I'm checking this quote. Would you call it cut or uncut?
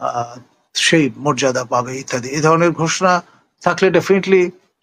uncut